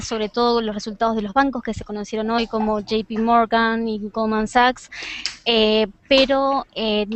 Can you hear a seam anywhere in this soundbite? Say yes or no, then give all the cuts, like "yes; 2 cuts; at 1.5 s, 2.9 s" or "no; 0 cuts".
yes; 1 cut; at 1.3 s